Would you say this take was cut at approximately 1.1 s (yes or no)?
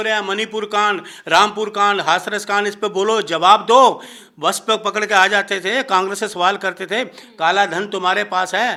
no